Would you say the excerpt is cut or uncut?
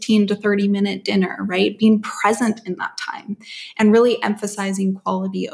uncut